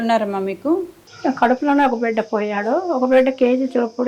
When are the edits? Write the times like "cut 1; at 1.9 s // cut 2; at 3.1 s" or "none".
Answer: cut 1; at 0.9 s